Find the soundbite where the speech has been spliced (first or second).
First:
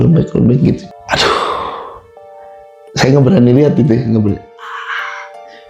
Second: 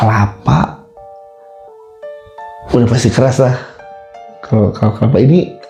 first